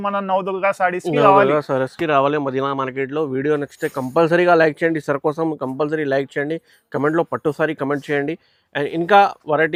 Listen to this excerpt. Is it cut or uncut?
uncut